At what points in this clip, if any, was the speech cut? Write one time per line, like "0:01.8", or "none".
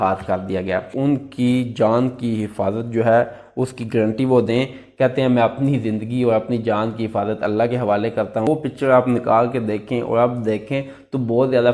0:00.9
0:08.5